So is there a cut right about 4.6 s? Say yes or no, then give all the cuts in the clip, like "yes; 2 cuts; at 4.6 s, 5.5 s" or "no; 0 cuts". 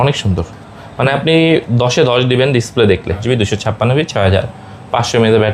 no; 1 cut; at 3.2 s